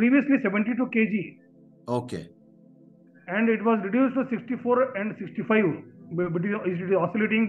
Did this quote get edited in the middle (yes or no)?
no